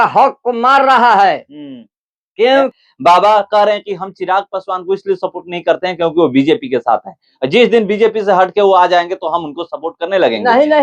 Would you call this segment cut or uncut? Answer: cut